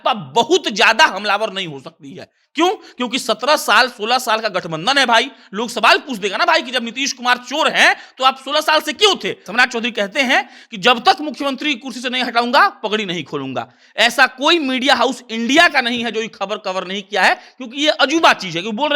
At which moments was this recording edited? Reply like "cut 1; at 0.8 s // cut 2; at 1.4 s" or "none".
cut 1; at 9.5 s